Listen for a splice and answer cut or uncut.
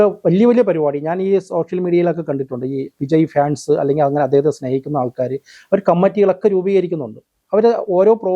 uncut